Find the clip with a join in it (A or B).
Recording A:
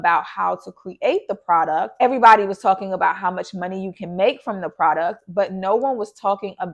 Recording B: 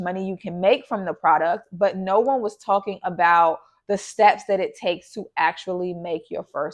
A